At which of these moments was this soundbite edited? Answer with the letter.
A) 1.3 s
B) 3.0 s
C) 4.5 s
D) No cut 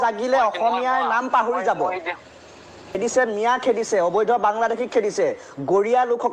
B